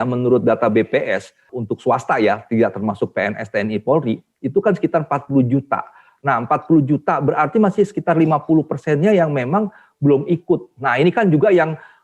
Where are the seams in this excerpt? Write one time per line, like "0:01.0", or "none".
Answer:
0:01.5